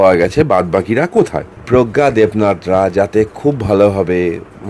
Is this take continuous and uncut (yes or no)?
no